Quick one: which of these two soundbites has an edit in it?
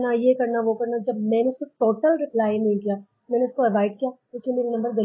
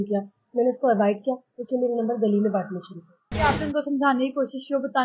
second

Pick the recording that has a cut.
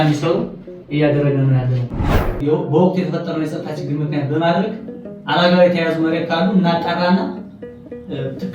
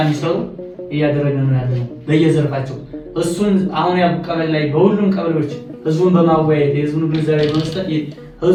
first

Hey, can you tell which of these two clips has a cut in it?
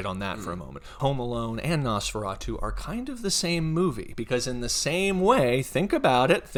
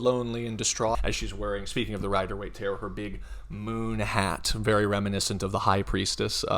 second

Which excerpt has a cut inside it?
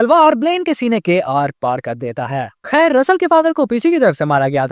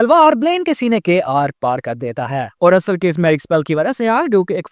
second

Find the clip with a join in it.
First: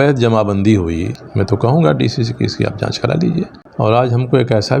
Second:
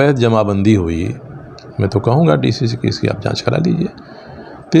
first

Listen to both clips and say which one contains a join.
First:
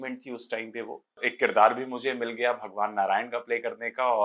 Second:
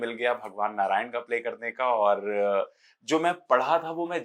first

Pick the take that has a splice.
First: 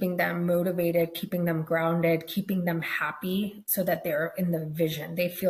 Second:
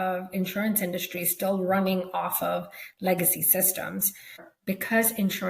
second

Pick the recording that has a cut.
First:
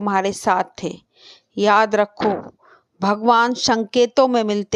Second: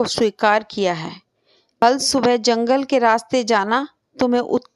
second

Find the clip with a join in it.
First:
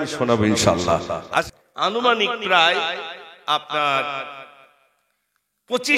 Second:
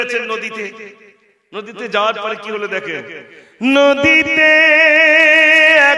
first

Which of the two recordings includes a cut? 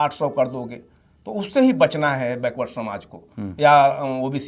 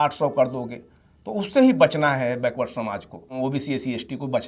second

